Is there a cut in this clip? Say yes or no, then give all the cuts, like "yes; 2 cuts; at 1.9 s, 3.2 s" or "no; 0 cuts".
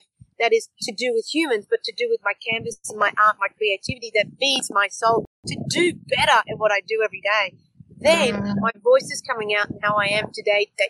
no; 0 cuts